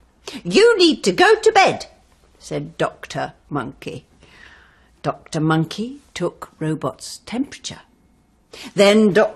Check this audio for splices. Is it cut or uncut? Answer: uncut